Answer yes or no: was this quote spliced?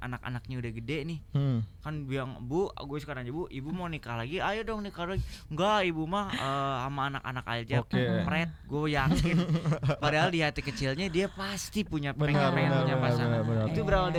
no